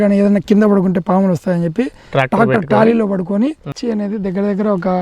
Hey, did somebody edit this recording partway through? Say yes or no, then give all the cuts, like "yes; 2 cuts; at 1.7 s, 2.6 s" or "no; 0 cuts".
yes; 1 cut; at 3.8 s